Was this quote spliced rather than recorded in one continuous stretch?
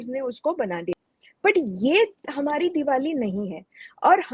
yes; 1 cut; at 1.0 s

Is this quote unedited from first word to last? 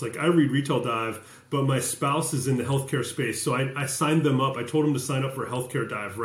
yes; 0 cuts

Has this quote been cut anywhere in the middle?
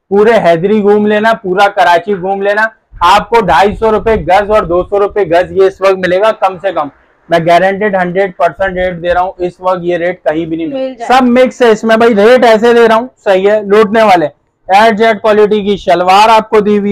yes; 1 cut; at 10.7 s

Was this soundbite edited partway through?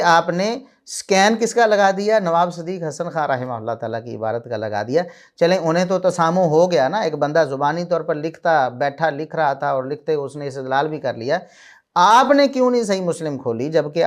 no; 0 cuts

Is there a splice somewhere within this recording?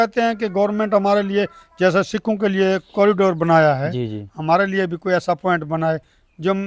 no; 0 cuts

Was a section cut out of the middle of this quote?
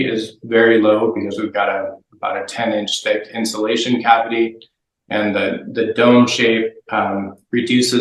no; 0 cuts

